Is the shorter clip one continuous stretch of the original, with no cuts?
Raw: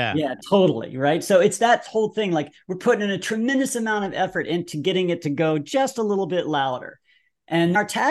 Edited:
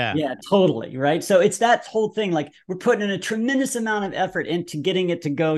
yes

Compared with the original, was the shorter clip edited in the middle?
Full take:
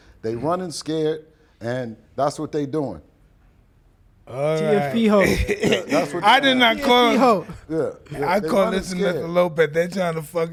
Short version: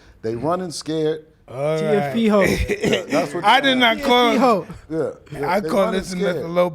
yes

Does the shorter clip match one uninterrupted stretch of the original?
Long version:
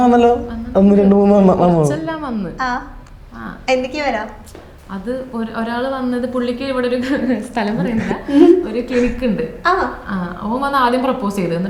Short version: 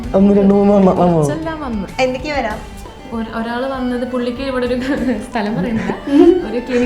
no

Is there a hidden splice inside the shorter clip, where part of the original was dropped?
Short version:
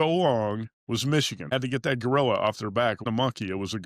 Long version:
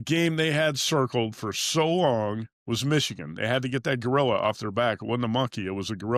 yes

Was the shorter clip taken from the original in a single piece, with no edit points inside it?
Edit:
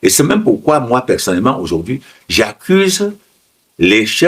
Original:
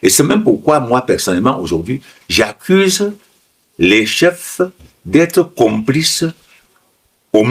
yes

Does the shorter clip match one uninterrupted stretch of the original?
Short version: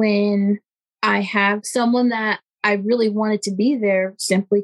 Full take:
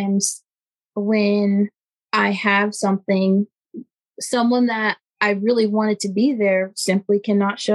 no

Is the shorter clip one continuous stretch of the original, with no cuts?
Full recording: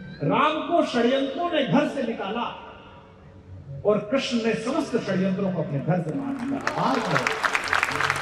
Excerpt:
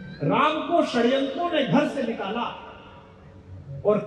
yes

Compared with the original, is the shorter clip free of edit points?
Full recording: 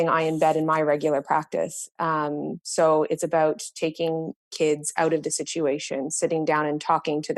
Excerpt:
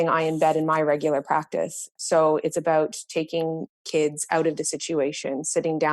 no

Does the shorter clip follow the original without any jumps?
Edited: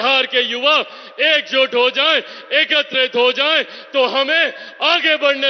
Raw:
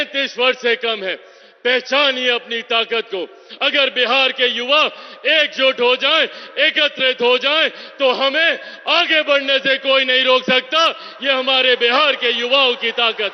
yes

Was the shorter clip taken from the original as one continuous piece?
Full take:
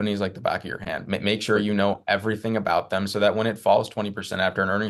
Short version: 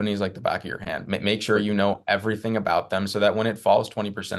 yes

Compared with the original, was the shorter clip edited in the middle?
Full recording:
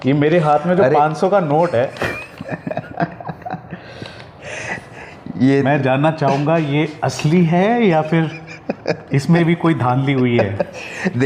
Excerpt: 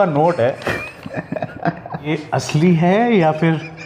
yes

